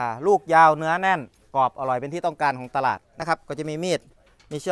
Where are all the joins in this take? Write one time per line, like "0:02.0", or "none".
0:03.1